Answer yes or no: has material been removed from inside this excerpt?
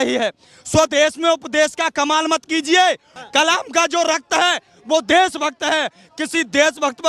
yes